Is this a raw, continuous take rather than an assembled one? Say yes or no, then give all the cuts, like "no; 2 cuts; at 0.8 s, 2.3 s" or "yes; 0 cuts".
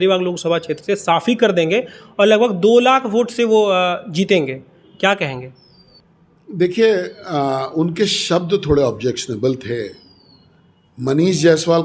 yes; 0 cuts